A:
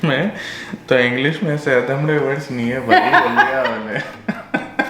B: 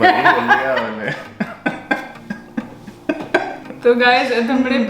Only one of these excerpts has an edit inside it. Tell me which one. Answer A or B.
B